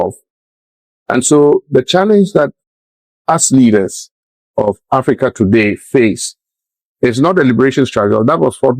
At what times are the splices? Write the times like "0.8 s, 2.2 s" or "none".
none